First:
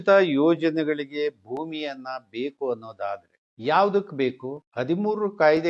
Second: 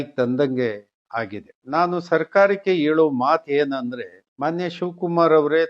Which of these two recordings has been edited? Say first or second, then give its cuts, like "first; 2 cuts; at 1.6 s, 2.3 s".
second; 1 cut; at 1.6 s